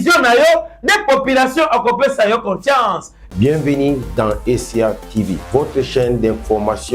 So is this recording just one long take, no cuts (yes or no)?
no